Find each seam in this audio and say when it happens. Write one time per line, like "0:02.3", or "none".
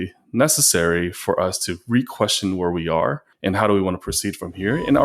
0:03.3